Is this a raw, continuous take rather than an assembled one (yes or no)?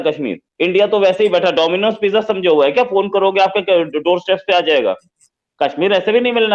yes